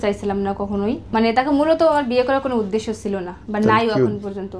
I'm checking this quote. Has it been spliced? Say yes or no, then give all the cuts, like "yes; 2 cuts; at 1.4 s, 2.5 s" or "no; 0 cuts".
yes; 1 cut; at 1.0 s